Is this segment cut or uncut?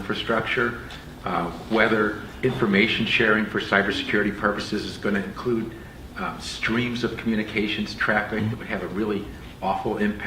cut